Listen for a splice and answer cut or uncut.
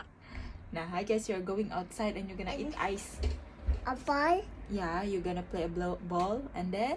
uncut